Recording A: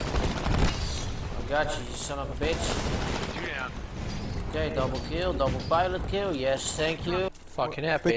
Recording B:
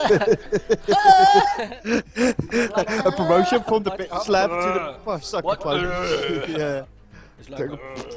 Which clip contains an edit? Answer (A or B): A